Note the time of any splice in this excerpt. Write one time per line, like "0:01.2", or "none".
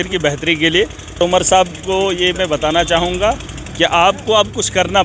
0:01.2